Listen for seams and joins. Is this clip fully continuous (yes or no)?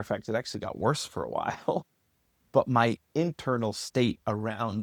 yes